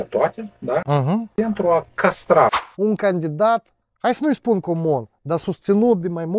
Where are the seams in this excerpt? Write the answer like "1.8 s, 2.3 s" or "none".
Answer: 2.6 s